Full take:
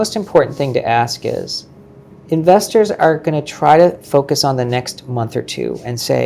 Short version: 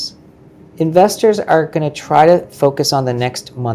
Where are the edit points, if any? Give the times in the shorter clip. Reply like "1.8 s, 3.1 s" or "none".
none